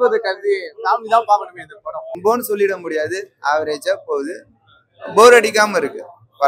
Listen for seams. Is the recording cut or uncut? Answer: cut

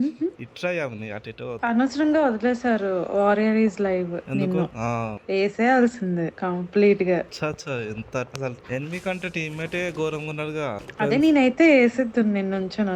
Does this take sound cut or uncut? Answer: cut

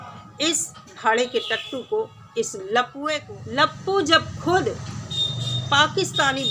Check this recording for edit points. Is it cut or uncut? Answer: cut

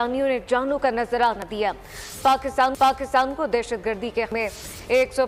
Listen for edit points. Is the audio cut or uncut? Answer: uncut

